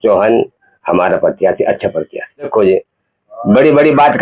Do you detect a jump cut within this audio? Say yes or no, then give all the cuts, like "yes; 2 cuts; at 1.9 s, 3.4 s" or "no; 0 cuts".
yes; 1 cut; at 2.5 s